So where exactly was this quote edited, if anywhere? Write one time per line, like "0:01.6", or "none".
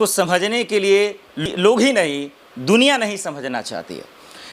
0:01.5